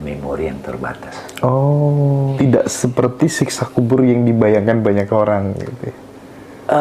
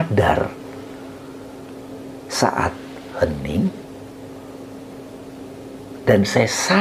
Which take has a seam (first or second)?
first